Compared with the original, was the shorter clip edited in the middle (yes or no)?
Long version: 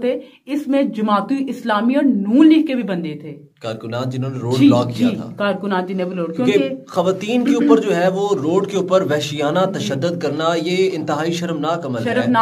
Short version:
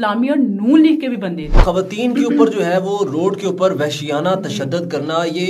yes